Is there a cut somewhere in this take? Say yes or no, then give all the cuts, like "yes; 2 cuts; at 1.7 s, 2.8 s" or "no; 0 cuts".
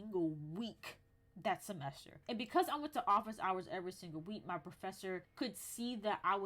yes; 1 cut; at 2.1 s